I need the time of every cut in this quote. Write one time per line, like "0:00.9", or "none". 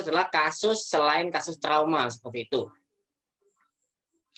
none

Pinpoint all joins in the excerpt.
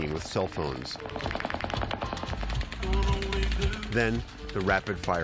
0:02.4

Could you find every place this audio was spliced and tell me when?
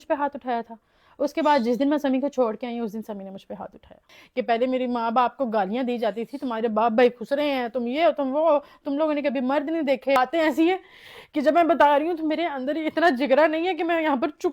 0:04.1
0:10.2

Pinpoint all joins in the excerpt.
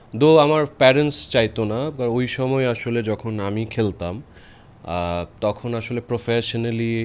none

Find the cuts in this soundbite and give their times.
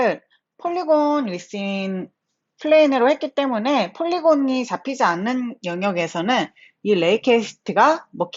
none

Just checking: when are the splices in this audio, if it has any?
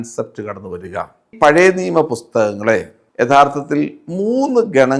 0:01.3
0:03.0

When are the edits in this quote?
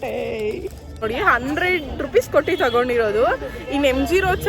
0:01.0

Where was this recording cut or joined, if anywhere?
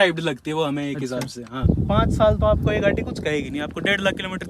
0:01.6

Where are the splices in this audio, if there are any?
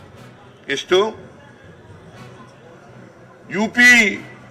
none

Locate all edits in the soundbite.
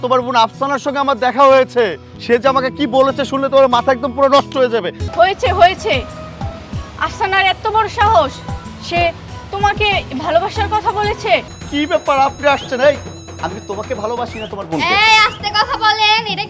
0:05.0
0:11.6

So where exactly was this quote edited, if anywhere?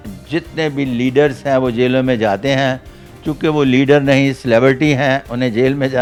none

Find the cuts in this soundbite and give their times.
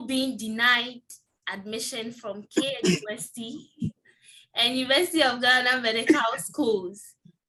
none

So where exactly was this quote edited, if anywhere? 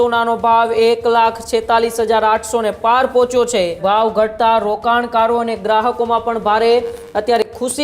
0:03.8

